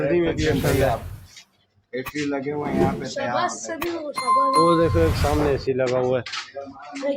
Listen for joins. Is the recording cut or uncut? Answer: uncut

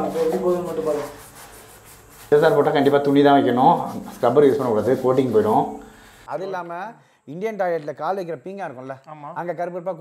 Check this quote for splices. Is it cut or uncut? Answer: cut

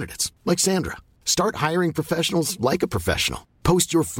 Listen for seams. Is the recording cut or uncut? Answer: uncut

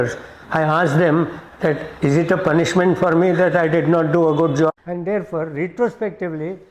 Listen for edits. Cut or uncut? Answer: cut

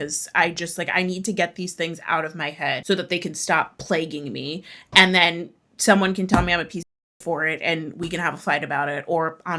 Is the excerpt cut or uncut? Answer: cut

